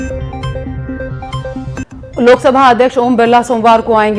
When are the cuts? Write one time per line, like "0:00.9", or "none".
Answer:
0:01.7